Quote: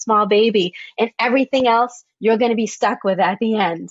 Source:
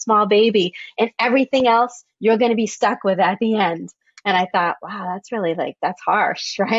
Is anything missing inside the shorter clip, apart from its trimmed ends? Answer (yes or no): no